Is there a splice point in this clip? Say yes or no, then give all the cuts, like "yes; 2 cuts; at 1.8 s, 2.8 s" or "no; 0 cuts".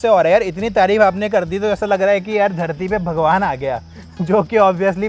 no; 0 cuts